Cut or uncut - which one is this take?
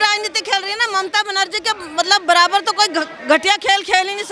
uncut